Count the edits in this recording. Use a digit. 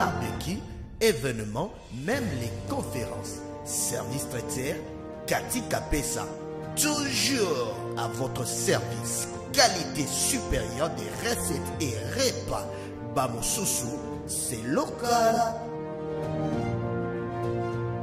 0